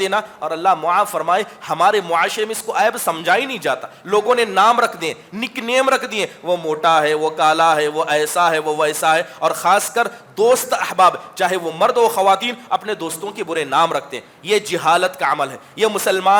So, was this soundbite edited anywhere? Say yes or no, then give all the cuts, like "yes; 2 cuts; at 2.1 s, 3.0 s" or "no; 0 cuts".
no; 0 cuts